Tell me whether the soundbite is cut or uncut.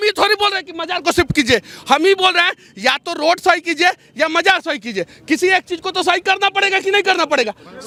uncut